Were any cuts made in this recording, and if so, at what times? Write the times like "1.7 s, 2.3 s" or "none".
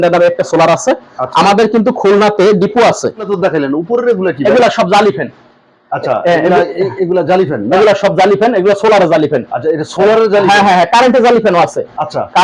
3.3 s